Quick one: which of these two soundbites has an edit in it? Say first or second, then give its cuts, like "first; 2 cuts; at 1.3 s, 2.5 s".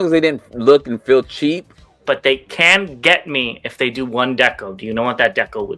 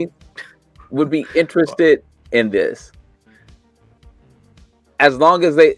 first; 1 cut; at 1.9 s